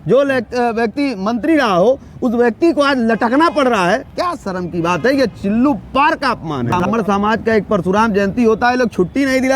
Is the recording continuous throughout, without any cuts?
no; 1 cut; at 6.7 s

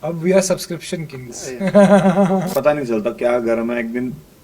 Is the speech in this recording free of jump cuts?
no; 1 cut; at 2.5 s

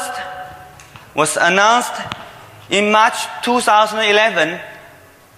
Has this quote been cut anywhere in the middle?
yes; 1 cut; at 3.8 s

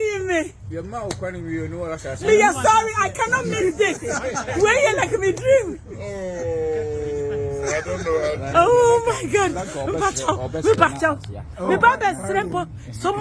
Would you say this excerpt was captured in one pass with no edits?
yes; 0 cuts

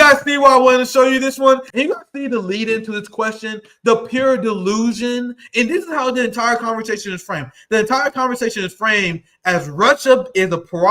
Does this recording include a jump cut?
yes; 1 cut; at 1.7 s

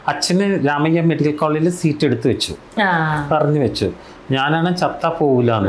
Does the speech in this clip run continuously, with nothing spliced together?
yes; 0 cuts

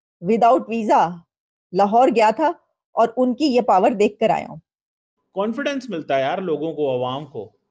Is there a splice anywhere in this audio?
yes; 1 cut; at 5.2 s

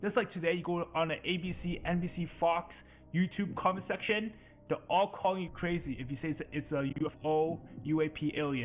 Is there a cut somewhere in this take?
no; 0 cuts

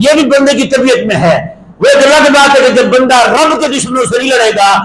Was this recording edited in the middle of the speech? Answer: no; 0 cuts

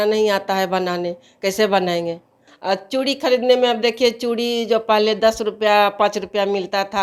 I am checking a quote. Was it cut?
yes; 1 cut; at 2.5 s

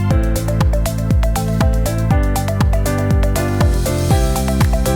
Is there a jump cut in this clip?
no; 0 cuts

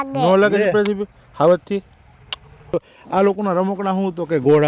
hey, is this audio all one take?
no; 1 cut; at 2.8 s

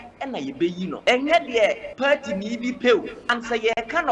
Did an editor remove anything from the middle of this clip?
yes; 3 cuts; at 1.0 s, 1.9 s, 3.2 s

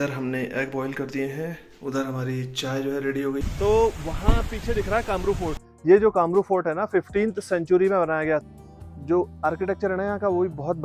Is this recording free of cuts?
no; 3 cuts; at 3.4 s, 5.6 s, 8.4 s

